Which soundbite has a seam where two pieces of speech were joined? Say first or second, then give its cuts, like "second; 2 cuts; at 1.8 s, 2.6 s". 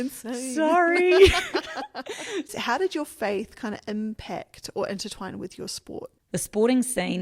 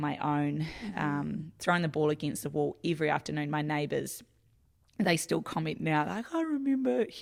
first; 2 cuts; at 2.5 s, 6.1 s